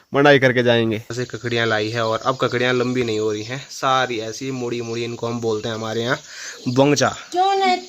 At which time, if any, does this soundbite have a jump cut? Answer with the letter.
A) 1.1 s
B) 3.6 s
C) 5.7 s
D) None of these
A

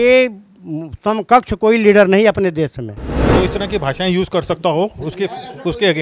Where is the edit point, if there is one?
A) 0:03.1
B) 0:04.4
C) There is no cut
A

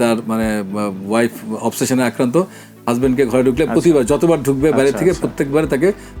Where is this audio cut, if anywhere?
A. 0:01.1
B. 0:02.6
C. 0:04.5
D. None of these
D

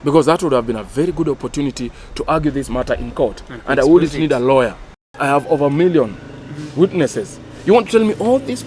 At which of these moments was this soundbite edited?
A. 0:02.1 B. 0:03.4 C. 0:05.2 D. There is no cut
C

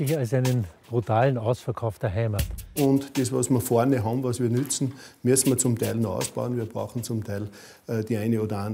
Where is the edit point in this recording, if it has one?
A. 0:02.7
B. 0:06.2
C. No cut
A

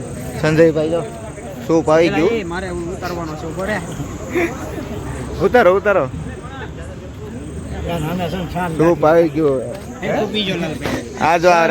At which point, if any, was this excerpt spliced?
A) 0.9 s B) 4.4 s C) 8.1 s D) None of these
D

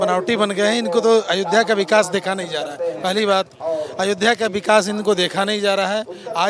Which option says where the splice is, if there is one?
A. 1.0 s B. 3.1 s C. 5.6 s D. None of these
D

